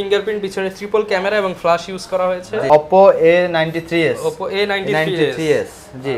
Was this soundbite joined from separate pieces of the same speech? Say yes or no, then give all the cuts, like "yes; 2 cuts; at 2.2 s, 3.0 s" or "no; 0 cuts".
yes; 1 cut; at 2.6 s